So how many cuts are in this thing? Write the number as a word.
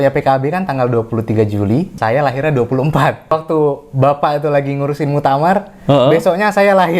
two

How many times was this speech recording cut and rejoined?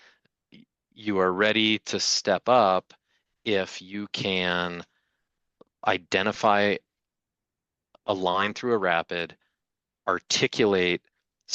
zero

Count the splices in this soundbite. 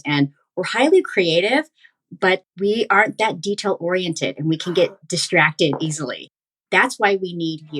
one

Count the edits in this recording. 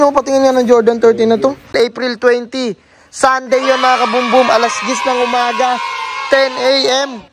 one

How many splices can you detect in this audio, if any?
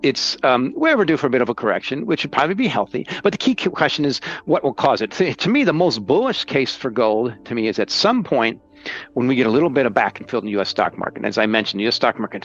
zero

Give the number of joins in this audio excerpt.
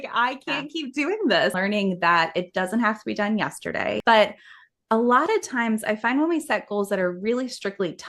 two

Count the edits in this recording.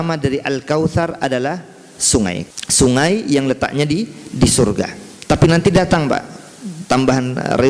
one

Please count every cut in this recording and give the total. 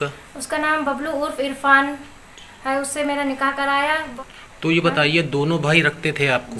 one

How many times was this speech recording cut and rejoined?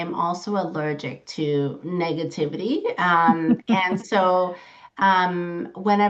zero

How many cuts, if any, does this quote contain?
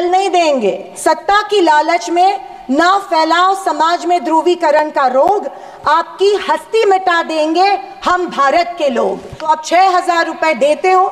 two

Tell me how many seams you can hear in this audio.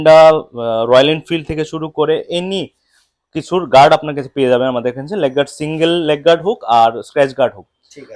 zero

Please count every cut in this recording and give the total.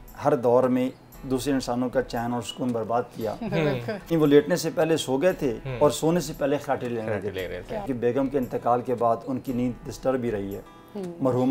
two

